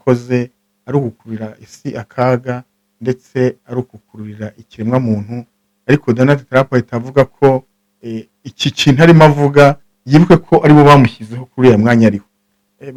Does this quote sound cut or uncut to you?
uncut